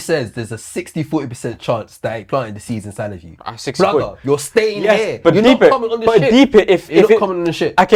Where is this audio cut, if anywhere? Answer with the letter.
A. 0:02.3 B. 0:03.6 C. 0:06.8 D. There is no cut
D